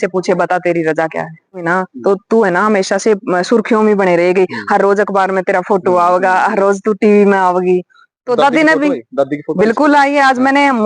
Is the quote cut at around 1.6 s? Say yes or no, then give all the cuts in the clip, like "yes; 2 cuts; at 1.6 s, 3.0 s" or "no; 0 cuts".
yes; 1 cut; at 1.6 s